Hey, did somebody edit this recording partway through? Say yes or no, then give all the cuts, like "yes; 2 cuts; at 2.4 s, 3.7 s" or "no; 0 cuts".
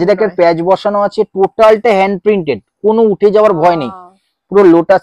no; 0 cuts